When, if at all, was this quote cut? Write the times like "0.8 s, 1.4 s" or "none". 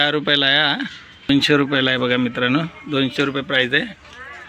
1.3 s